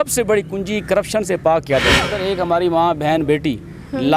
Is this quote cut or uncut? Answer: cut